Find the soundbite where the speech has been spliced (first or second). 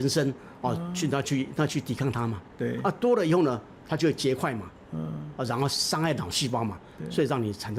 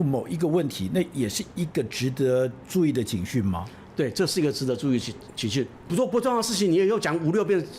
second